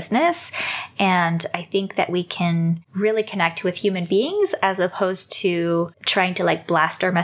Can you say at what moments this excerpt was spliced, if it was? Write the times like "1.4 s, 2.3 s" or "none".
2.9 s, 6.0 s